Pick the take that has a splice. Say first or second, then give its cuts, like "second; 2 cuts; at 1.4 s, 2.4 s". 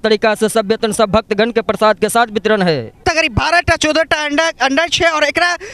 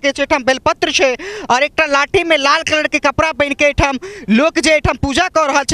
first; 1 cut; at 3.0 s